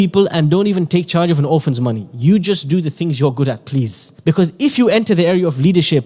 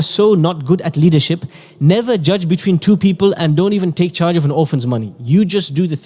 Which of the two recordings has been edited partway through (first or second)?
first